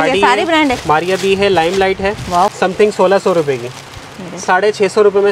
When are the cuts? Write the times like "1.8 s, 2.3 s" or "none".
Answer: 2.5 s